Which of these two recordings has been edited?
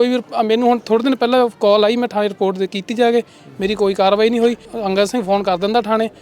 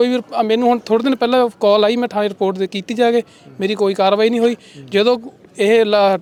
first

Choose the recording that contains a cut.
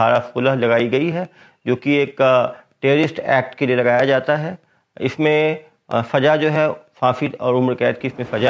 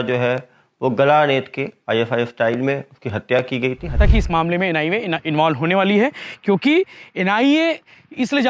second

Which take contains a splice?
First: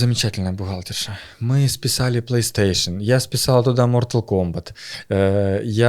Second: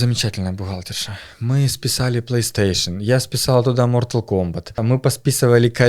second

